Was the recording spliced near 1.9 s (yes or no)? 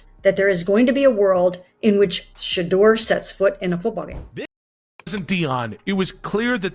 no